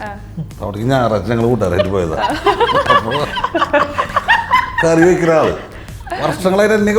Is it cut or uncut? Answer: uncut